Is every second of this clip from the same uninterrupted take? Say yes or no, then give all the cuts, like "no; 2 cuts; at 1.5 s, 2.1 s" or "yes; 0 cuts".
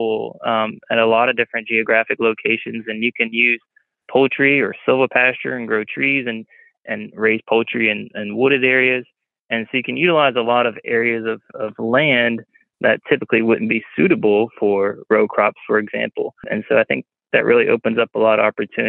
no; 1 cut; at 16.4 s